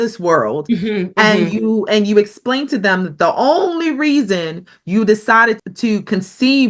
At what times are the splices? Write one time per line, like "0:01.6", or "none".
0:05.6